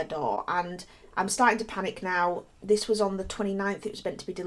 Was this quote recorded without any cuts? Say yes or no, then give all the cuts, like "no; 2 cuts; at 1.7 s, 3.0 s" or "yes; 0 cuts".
yes; 0 cuts